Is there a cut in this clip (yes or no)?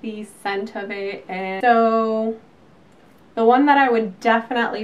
yes